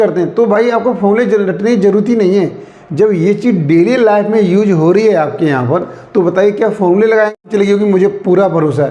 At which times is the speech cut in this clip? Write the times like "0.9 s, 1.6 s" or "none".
7.4 s